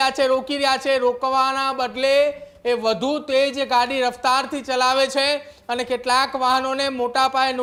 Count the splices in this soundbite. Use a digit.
0